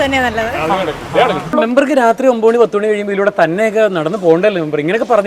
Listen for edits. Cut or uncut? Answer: cut